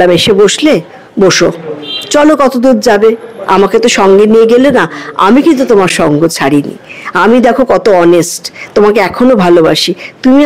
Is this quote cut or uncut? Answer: uncut